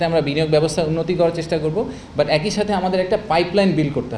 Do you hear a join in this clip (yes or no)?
no